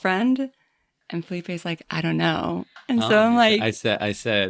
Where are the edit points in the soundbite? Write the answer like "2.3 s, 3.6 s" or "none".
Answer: 2.7 s